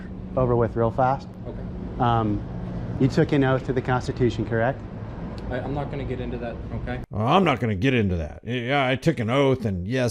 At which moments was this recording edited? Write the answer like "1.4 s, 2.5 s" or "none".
none